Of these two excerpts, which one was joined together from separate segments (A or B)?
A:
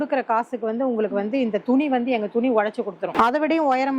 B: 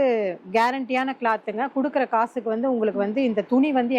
A